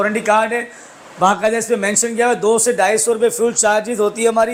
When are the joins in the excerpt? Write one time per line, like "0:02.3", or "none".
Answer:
none